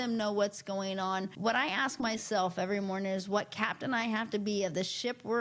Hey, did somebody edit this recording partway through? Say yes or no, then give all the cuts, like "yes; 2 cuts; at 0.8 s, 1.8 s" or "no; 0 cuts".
yes; 1 cut; at 1.3 s